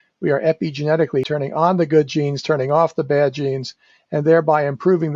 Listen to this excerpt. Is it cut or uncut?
cut